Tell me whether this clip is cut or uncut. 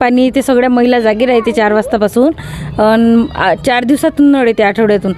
uncut